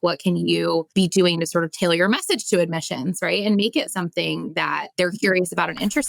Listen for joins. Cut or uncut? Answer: cut